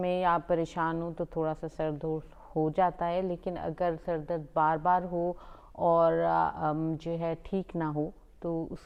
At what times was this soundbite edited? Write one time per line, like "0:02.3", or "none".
none